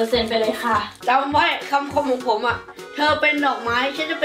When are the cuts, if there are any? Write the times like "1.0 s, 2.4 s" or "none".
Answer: 0.9 s